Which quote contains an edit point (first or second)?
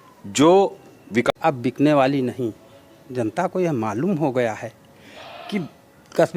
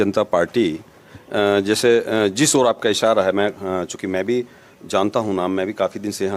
first